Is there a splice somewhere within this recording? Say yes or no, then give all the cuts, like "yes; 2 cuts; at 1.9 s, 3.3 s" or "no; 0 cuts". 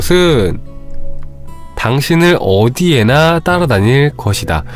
no; 0 cuts